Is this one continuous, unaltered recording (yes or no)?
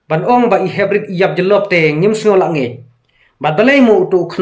yes